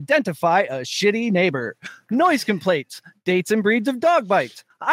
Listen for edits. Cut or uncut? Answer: uncut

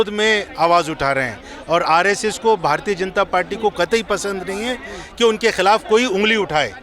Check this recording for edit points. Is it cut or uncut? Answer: uncut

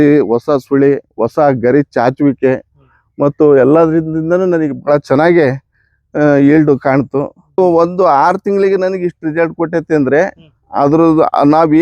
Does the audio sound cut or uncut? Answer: cut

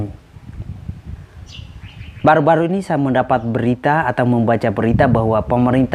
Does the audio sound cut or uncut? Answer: uncut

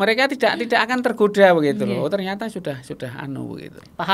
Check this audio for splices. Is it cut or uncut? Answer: uncut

